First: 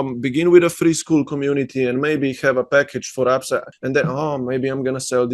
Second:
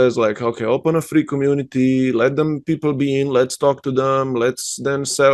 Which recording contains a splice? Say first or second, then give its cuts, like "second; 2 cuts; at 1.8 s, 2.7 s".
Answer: first; 1 cut; at 3.7 s